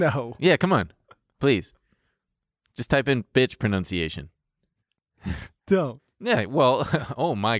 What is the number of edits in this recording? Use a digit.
0